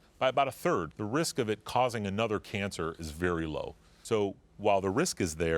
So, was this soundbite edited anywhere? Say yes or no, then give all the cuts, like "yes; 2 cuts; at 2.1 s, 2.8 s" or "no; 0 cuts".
yes; 2 cuts; at 0.9 s, 3.9 s